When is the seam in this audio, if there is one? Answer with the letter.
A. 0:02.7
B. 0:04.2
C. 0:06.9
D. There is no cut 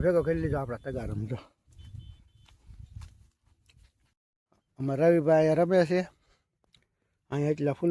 B